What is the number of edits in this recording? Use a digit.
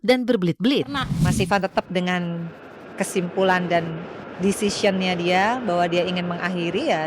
1